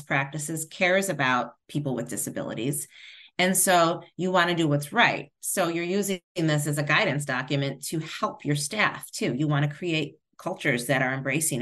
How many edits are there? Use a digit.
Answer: 1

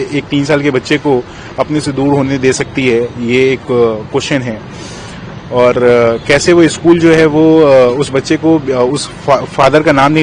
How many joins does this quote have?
0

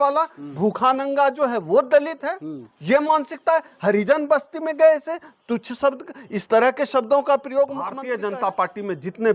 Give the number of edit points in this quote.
1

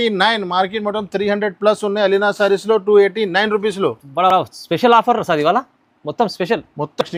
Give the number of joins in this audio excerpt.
0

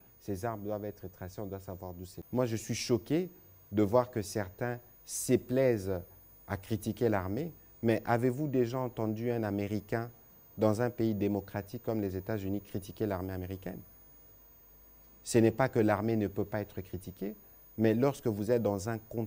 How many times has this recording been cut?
1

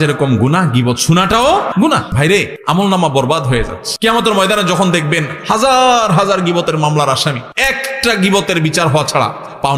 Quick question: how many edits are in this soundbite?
3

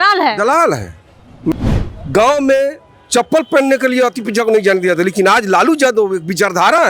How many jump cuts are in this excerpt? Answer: 1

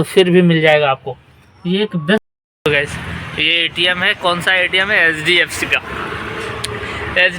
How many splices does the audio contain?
1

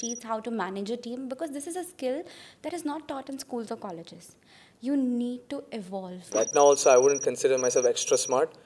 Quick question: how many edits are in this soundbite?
1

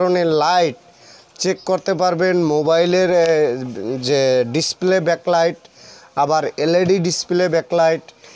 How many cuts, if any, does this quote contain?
1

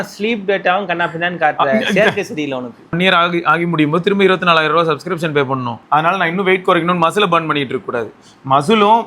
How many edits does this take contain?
2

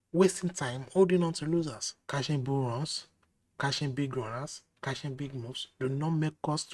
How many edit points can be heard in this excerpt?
1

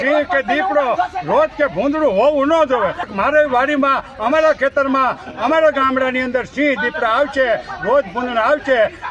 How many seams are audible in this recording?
1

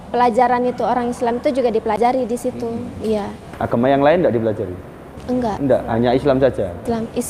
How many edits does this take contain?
0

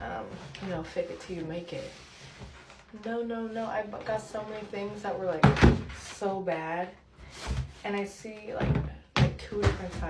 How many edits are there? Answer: 0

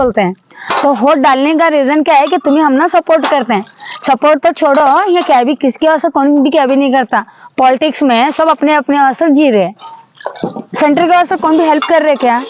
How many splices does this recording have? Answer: 0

